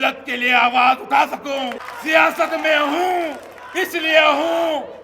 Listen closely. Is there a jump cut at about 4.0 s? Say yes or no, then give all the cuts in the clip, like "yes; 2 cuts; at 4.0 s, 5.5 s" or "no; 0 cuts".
no; 1 cut; at 1.9 s